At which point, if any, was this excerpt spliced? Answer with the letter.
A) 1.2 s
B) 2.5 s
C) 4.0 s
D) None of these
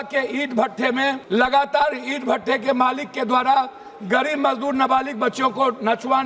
A